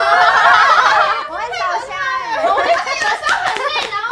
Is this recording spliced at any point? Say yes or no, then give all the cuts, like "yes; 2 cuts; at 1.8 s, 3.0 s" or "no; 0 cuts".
yes; 2 cuts; at 1.2 s, 2.7 s